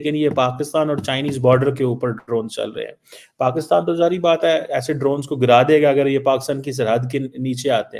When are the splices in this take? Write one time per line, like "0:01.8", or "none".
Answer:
none